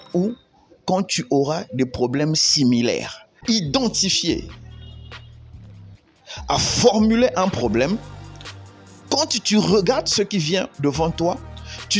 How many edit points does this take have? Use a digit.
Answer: 1